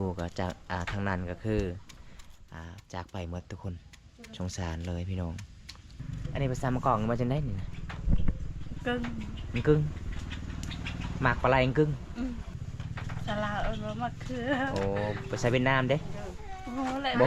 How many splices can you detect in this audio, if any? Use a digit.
2